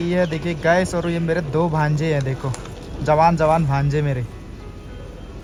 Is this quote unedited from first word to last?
yes; 0 cuts

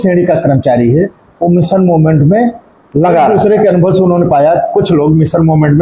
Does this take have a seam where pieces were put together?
yes; 1 cut; at 3.3 s

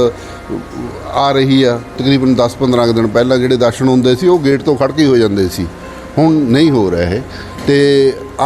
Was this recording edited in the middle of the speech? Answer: yes; 1 cut; at 2.0 s

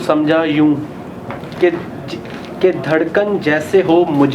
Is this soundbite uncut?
yes; 0 cuts

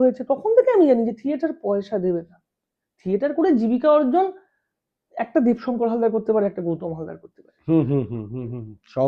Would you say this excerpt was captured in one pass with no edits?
yes; 0 cuts

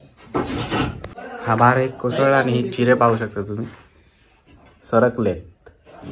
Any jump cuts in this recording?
yes; 1 cut; at 1.1 s

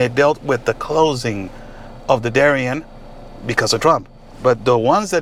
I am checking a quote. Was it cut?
no; 0 cuts

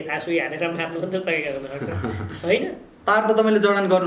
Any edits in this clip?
yes; 1 cut; at 2.9 s

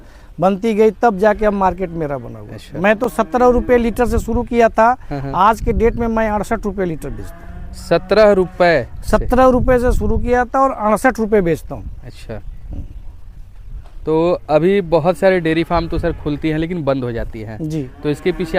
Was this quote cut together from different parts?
no; 0 cuts

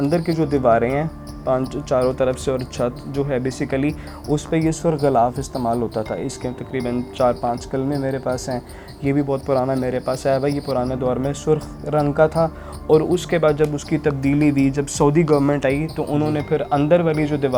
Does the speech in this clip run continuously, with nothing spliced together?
yes; 0 cuts

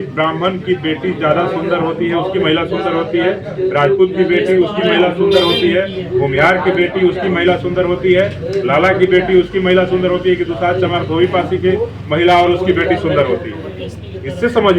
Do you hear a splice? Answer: no; 0 cuts

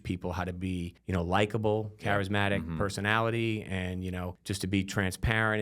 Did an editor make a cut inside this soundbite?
yes; 3 cuts; at 1.0 s, 2.0 s, 4.4 s

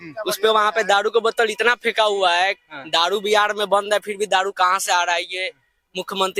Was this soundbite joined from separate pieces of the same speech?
no; 0 cuts

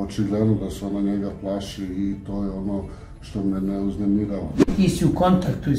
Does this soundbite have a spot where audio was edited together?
yes; 1 cut; at 4.6 s

